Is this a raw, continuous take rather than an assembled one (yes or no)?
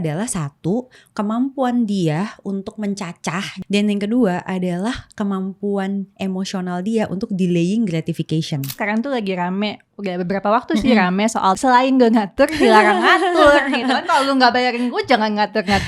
no